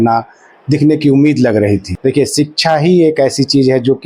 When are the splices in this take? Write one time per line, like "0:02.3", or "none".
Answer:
0:01.9

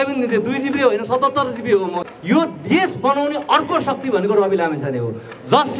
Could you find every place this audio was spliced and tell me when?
0:01.7

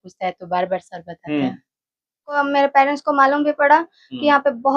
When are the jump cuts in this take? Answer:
0:02.4

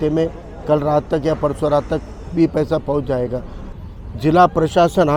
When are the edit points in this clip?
0:03.7

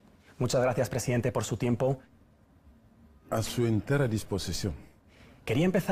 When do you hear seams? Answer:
none

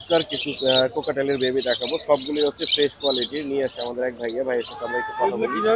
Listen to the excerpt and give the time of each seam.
none

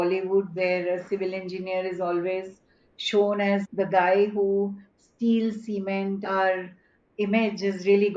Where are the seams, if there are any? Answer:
0:06.2

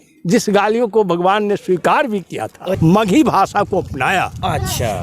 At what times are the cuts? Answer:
0:02.6

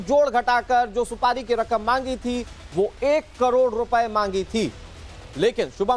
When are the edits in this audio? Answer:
0:03.3

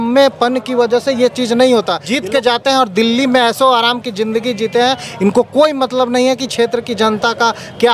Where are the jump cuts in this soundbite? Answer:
0:02.0

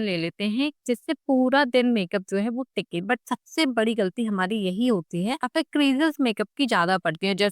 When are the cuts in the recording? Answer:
0:05.5

